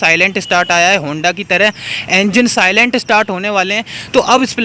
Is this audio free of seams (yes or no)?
yes